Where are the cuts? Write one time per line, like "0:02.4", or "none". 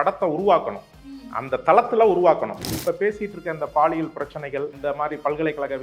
0:02.7
0:04.8